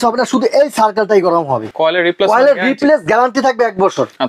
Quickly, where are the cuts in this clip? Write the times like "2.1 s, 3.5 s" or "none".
1.6 s